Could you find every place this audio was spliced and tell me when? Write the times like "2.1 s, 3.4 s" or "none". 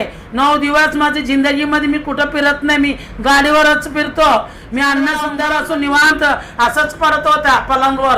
5.3 s

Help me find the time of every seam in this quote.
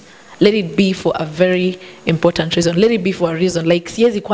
none

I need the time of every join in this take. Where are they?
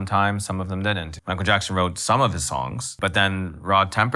1.1 s, 2.9 s

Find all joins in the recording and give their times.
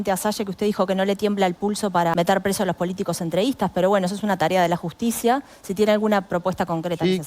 2.1 s

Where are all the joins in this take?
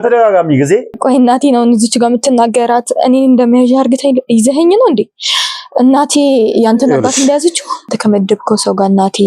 1.0 s, 8.0 s

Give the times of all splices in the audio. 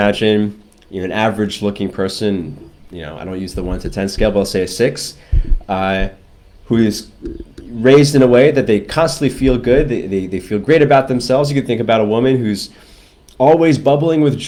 none

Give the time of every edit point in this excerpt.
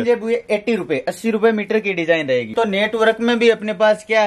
2.5 s

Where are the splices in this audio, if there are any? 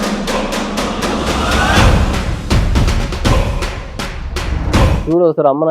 4.7 s

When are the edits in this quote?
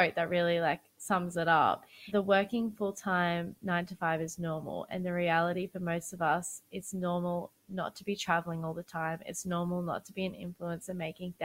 0.9 s, 2.0 s

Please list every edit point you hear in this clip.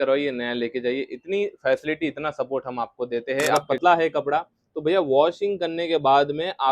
3.6 s

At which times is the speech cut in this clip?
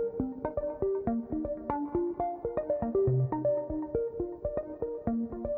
none

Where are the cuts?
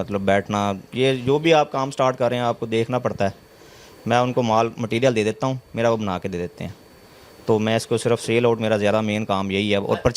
none

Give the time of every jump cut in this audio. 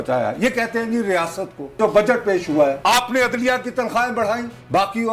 1.8 s, 2.8 s

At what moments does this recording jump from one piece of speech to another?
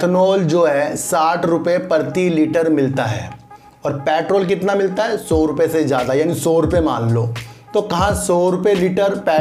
none

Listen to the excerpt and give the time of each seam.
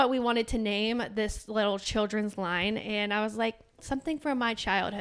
none

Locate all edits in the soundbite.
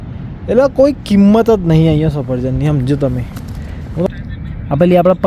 4.1 s

